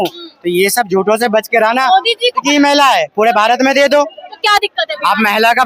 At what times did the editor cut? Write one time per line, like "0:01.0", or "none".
0:02.4